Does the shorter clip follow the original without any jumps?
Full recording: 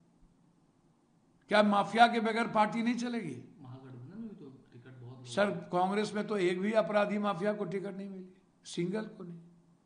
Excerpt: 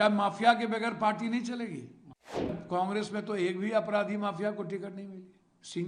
no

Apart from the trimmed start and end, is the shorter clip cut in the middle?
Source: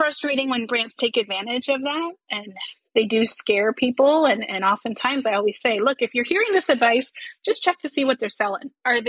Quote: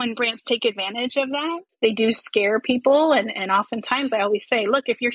yes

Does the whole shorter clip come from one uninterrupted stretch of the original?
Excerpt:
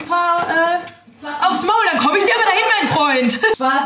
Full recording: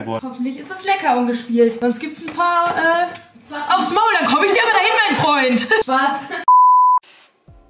yes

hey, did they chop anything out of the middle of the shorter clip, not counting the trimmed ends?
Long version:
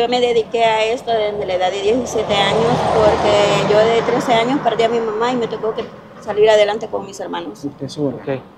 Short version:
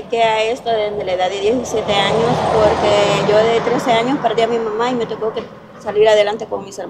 no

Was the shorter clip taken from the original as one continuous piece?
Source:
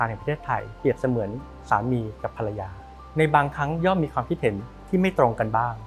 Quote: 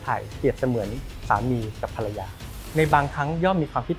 yes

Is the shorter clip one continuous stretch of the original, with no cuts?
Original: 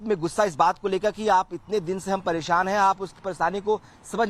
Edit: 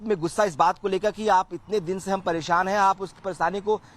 yes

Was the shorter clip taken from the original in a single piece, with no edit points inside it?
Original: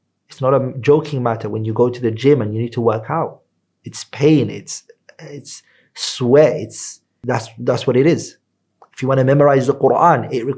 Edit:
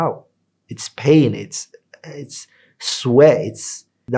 yes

